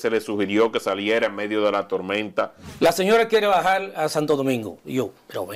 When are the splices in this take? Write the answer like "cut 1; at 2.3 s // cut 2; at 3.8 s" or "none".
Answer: cut 1; at 2.6 s